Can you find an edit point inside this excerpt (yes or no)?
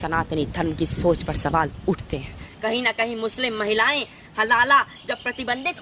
yes